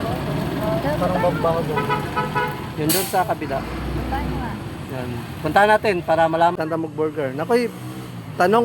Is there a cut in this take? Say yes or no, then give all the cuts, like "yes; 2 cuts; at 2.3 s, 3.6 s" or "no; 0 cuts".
yes; 1 cut; at 6.5 s